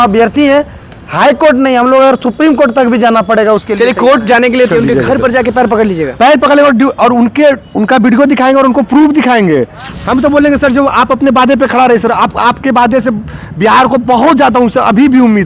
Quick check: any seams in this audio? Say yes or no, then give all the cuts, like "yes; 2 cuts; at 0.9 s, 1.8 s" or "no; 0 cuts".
yes; 2 cuts; at 4.7 s, 9.9 s